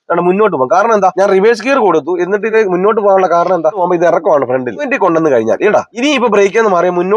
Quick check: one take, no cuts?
no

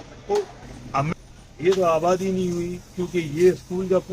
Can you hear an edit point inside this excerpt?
yes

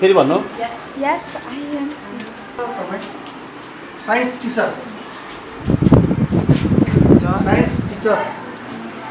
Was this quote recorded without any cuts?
no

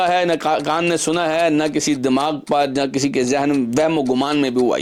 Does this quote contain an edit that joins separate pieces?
no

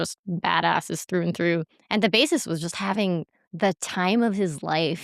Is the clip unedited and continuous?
no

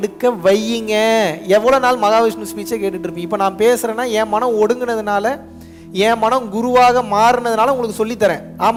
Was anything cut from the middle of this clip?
no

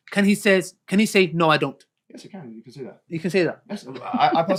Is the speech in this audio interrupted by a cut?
no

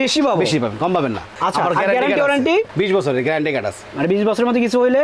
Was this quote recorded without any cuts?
no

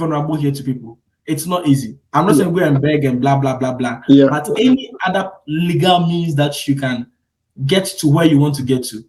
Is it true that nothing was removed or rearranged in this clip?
yes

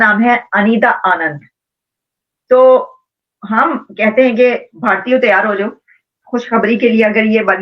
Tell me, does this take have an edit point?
no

